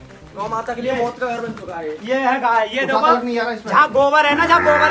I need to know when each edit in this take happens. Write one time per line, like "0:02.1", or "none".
none